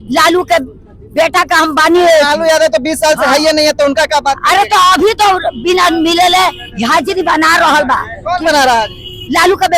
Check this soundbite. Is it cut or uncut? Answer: uncut